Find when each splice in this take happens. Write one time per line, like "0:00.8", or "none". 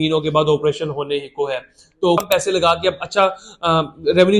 0:02.2